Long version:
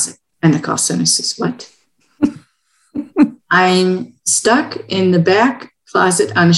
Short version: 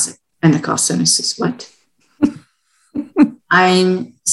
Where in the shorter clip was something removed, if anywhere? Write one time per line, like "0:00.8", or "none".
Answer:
none